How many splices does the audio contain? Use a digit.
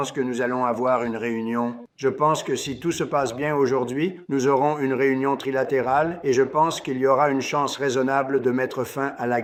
0